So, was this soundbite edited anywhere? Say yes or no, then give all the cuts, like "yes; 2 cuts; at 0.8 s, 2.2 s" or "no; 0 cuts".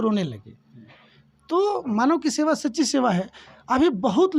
no; 0 cuts